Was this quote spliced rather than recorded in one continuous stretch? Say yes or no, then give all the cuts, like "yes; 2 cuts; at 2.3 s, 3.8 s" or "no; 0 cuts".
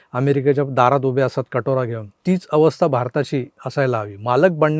yes; 2 cuts; at 2.1 s, 3.6 s